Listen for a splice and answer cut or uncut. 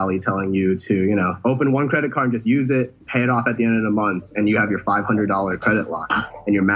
cut